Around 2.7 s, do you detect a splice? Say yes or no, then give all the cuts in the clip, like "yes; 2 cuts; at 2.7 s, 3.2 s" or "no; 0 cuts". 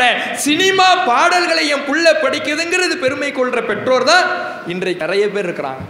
no; 1 cut; at 5.0 s